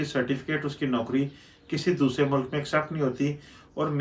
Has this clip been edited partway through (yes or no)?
no